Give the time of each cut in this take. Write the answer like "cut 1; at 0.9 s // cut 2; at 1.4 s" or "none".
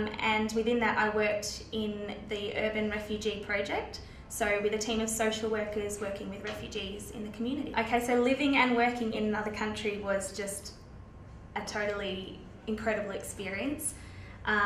none